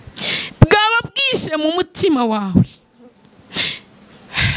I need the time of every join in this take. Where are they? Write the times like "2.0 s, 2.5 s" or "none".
none